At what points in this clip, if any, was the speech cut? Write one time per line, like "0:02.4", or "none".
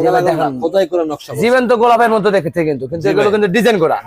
none